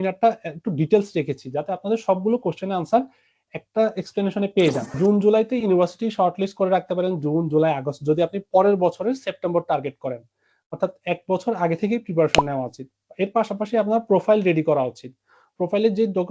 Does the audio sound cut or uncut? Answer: cut